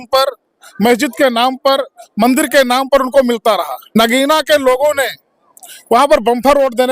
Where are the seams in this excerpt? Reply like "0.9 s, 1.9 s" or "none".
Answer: 3.9 s

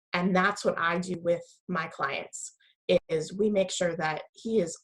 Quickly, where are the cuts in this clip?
none

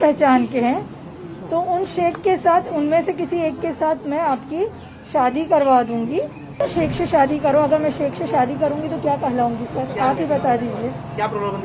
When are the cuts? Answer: 6.6 s

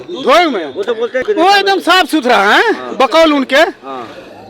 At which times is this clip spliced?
1.2 s

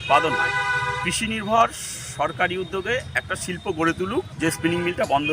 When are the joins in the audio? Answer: 4.3 s

